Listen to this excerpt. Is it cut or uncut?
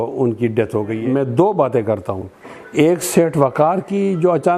cut